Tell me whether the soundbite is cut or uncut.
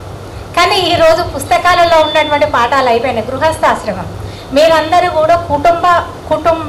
uncut